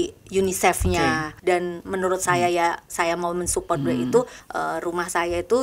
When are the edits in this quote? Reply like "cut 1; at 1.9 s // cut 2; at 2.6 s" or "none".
cut 1; at 1.3 s // cut 2; at 4.4 s